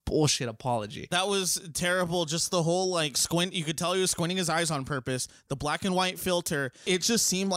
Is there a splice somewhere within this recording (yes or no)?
yes